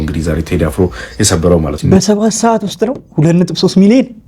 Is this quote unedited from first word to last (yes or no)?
no